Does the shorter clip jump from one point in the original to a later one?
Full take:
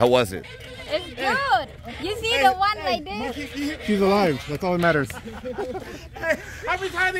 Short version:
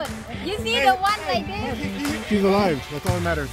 no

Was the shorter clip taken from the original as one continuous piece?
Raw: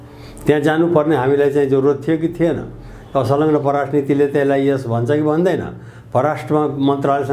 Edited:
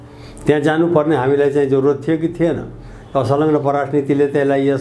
yes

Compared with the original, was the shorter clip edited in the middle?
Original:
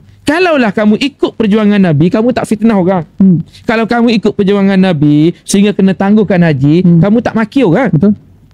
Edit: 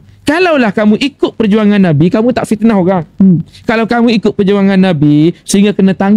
no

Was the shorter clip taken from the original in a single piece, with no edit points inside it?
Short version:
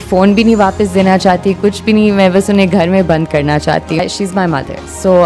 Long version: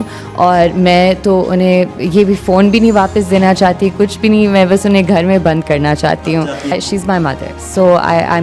no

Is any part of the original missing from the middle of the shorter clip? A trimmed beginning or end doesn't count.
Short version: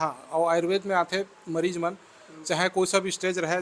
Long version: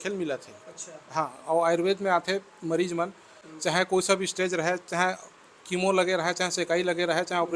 no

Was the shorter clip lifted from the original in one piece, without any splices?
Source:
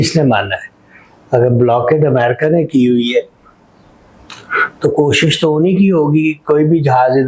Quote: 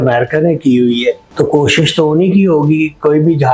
no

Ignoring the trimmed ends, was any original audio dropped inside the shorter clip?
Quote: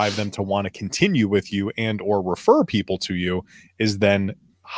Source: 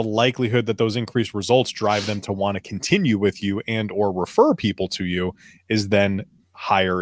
no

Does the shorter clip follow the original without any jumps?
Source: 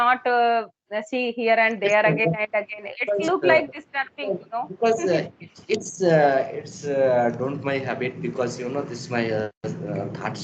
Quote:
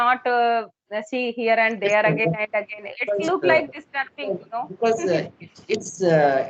yes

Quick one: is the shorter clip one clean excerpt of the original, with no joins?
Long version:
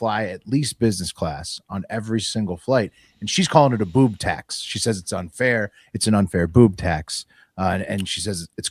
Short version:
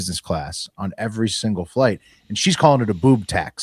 yes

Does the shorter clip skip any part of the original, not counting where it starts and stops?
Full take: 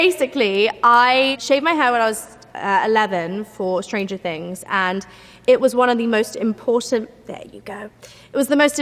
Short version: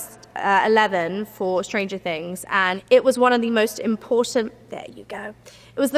yes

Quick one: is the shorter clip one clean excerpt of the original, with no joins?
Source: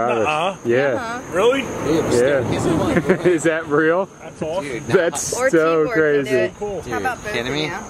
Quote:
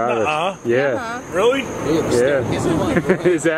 yes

